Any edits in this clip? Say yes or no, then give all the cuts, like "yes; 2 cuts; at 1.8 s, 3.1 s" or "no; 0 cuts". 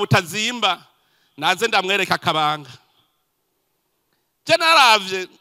no; 0 cuts